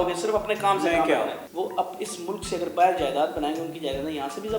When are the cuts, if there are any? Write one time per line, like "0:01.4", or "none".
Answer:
0:01.5